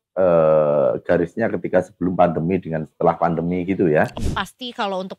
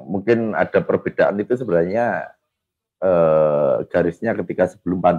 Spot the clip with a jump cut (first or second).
first